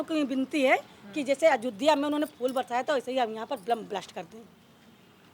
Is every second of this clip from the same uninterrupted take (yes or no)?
yes